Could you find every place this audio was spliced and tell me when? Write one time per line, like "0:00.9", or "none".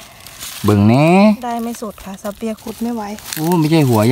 0:02.6